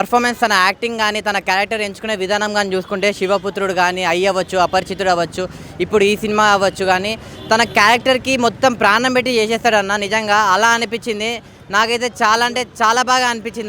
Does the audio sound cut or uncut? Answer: uncut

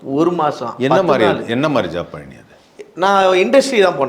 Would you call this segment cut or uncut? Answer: uncut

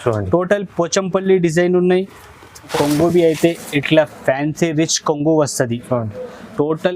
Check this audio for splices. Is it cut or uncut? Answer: cut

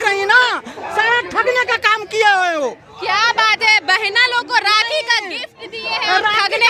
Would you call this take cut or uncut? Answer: uncut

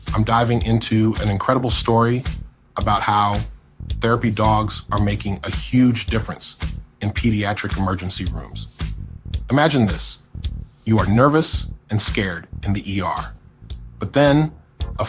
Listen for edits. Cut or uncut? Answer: cut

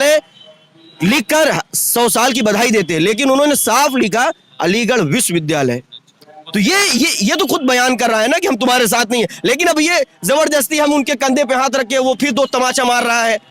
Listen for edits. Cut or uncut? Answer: uncut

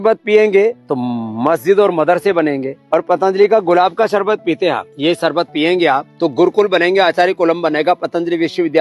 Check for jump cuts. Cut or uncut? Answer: cut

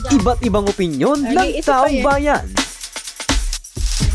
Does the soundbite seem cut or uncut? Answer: cut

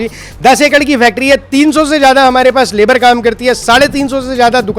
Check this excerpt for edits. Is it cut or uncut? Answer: uncut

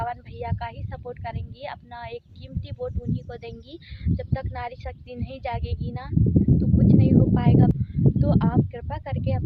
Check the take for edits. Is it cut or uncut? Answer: uncut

